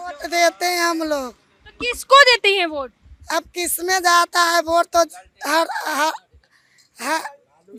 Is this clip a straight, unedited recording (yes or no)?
yes